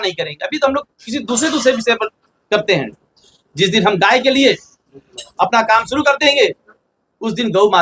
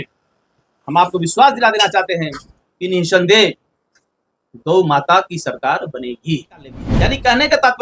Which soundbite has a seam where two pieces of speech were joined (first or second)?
second